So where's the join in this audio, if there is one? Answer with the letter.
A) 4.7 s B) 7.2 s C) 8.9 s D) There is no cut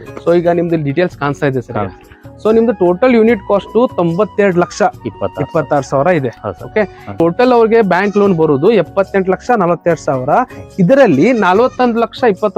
B